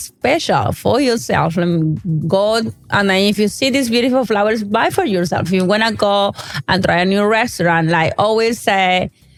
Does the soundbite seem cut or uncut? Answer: uncut